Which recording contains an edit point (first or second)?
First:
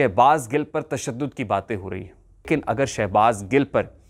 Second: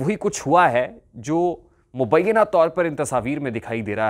first